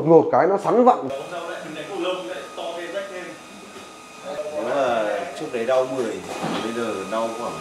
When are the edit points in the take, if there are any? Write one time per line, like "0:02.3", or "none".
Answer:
0:01.0